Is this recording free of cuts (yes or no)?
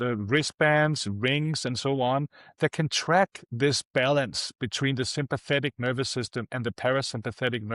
yes